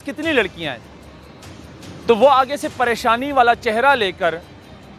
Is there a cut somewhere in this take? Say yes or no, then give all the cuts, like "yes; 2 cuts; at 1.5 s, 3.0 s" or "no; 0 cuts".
no; 0 cuts